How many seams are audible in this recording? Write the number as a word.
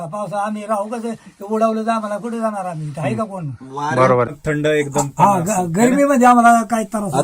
one